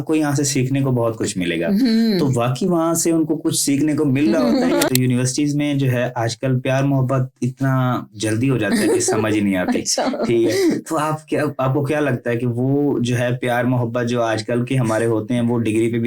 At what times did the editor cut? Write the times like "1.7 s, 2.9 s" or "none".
4.9 s